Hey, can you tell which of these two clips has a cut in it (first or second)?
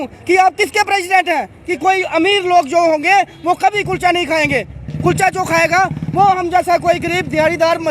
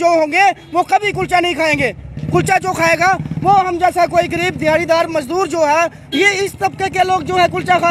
first